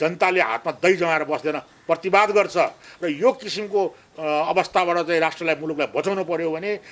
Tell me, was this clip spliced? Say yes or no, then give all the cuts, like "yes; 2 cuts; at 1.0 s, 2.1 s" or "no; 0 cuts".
no; 0 cuts